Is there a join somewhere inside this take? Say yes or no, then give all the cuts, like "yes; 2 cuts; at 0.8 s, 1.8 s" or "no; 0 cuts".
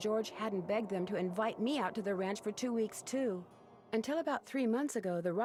no; 0 cuts